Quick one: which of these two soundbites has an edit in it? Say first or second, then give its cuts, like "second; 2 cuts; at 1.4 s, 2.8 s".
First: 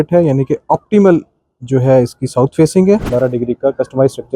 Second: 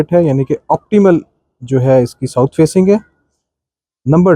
first; 1 cut; at 3.1 s